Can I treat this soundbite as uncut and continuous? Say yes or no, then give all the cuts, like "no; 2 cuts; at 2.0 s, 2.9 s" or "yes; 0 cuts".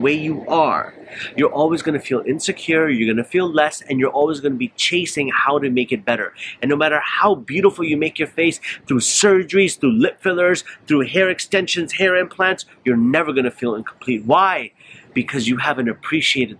yes; 0 cuts